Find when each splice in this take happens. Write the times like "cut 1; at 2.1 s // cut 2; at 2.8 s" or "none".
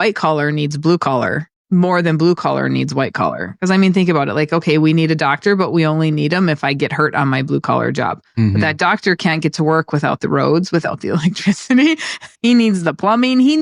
cut 1; at 1.5 s // cut 2; at 12.3 s